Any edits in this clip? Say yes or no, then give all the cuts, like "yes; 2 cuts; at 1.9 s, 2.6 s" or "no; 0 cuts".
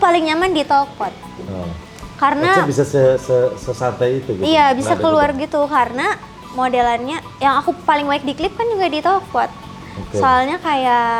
no; 0 cuts